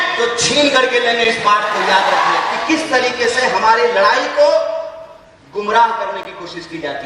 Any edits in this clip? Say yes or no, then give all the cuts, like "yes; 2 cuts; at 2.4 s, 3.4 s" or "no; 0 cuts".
yes; 1 cut; at 2.5 s